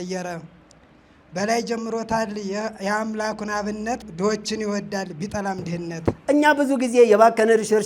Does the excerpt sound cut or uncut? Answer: cut